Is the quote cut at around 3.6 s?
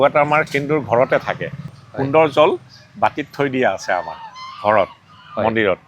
no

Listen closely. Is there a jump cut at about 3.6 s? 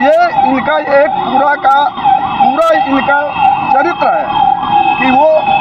yes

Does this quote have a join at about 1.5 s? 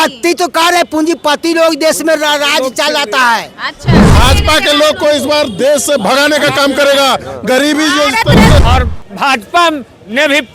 no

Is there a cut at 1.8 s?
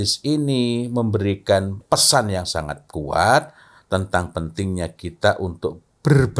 yes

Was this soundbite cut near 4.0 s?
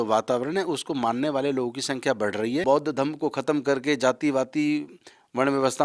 no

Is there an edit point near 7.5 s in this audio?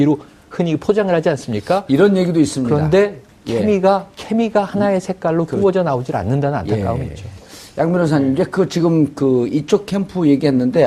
no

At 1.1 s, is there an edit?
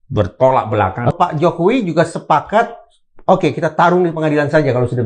yes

